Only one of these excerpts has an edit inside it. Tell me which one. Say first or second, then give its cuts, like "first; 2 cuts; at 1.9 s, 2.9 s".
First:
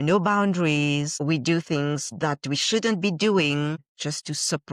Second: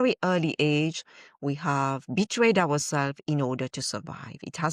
first; 3 cuts; at 1.1 s, 2.1 s, 3.9 s